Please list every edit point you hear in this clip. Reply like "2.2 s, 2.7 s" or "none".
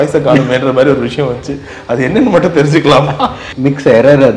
3.5 s